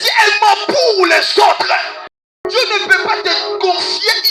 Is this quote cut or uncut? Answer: cut